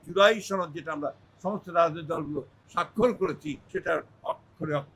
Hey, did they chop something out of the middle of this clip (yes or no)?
yes